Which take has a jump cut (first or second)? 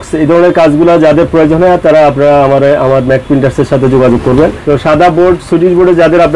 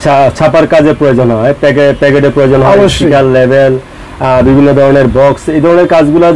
first